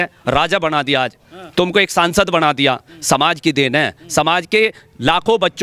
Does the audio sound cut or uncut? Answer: uncut